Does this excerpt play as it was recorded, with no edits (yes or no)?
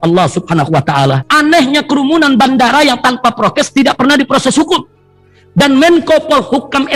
no